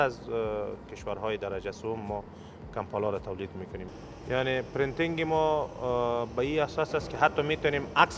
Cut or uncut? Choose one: cut